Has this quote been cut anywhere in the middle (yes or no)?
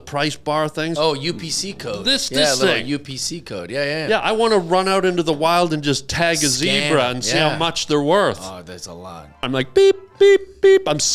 yes